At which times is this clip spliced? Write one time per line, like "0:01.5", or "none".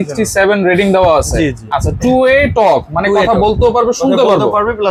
none

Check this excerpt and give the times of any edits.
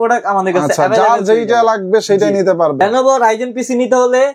0:02.8

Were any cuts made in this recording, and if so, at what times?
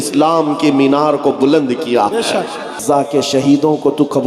0:02.8

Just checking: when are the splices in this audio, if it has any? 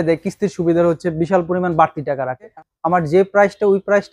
0:02.5

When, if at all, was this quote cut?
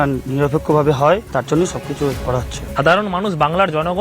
0:01.3
0:02.6

